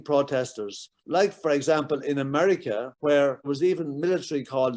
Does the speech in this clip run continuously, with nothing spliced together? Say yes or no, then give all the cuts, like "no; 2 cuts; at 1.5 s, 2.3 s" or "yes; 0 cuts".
no; 1 cut; at 3.4 s